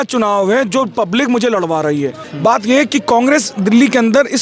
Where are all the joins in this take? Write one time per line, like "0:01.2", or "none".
0:02.3